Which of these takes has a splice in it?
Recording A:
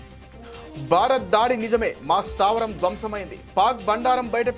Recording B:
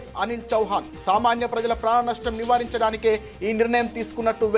A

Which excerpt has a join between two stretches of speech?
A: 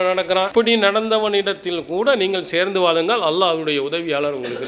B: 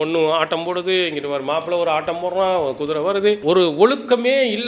B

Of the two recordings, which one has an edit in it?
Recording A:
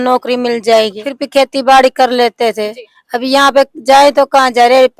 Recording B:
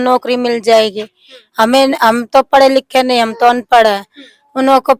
A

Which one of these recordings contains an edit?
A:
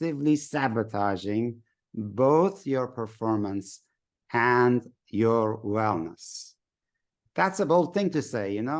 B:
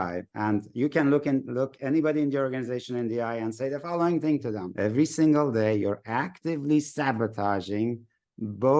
B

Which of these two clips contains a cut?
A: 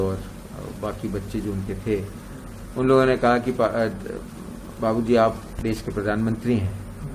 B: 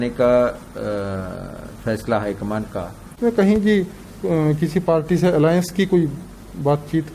B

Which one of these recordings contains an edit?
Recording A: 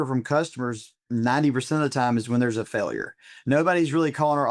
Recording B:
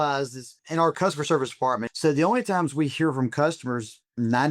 B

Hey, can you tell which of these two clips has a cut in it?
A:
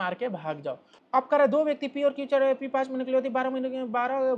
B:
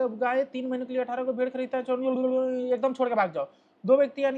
A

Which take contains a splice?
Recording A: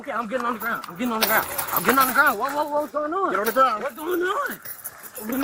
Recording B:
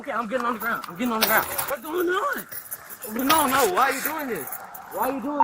B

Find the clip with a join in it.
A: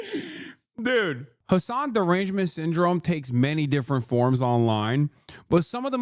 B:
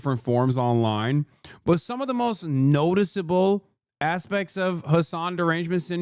A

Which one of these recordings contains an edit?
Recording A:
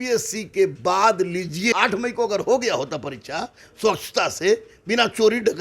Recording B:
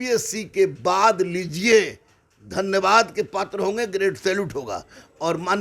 A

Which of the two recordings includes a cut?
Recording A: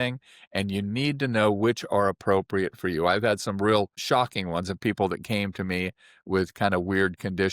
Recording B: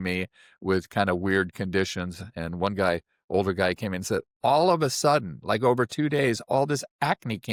A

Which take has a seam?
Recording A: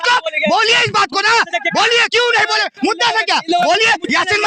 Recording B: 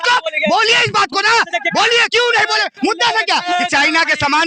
B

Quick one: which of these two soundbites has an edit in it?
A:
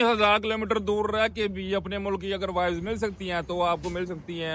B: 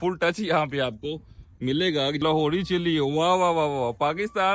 B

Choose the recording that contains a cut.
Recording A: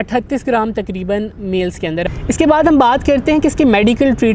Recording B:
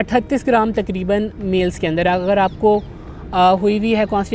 A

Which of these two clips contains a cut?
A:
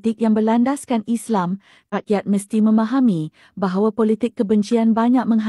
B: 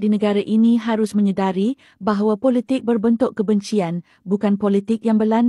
A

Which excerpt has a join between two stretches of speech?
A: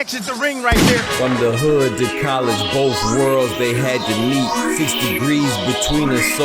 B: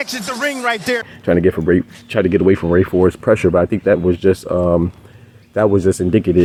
A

